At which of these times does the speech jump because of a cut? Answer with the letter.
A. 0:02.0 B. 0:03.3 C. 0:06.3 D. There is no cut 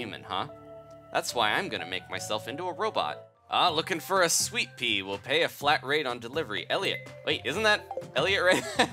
B